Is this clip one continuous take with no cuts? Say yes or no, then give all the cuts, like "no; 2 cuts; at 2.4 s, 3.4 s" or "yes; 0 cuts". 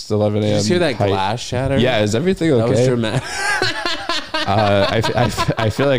yes; 0 cuts